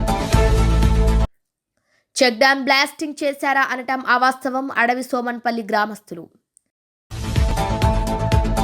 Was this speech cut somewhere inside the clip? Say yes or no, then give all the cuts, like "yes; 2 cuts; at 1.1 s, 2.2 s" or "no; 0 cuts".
yes; 1 cut; at 1.3 s